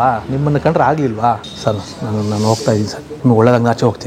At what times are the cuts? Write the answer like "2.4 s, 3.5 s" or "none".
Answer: 1.5 s, 3.0 s